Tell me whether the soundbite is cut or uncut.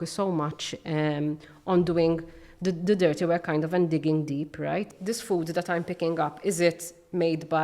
cut